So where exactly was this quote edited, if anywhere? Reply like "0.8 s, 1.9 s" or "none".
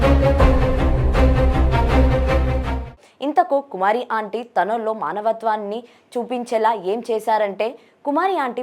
2.9 s

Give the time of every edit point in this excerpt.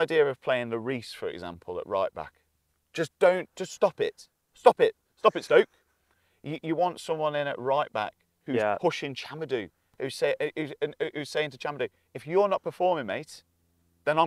6.2 s

